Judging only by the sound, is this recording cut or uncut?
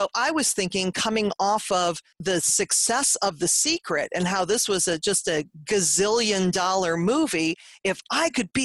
cut